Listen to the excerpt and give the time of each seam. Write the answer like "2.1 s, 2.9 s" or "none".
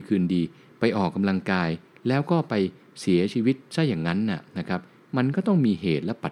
none